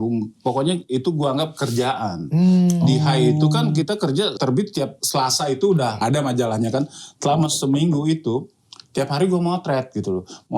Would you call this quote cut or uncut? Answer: cut